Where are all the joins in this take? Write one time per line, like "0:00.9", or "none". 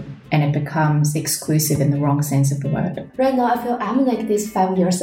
0:03.0